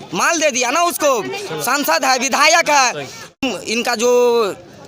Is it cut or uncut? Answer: cut